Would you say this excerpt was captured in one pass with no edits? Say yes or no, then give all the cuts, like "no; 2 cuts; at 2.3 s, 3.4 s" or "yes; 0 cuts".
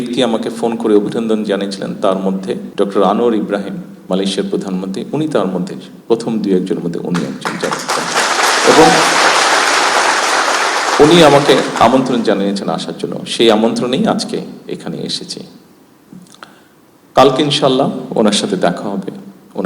no; 2 cuts; at 2.7 s, 3.9 s